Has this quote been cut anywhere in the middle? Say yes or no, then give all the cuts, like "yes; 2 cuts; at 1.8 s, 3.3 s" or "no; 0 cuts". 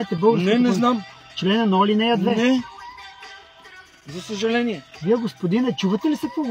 yes; 3 cuts; at 1.1 s, 2.7 s, 4.9 s